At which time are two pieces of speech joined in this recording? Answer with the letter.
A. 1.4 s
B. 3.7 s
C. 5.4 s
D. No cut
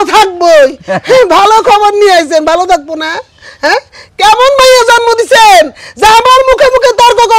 D